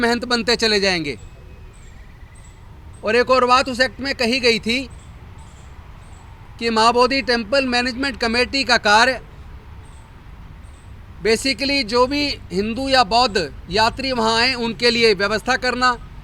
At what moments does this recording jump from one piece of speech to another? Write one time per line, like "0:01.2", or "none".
none